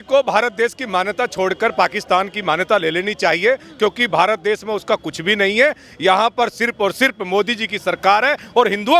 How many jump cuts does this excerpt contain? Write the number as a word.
zero